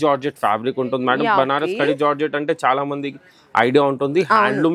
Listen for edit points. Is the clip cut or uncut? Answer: uncut